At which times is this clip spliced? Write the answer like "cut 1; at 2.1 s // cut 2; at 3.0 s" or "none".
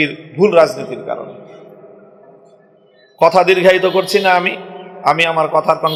none